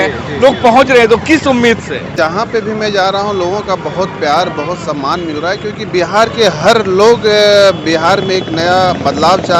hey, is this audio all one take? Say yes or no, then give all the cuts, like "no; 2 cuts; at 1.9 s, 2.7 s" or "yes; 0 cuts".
no; 1 cut; at 2.1 s